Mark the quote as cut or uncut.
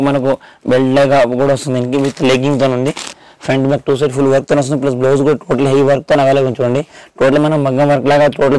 cut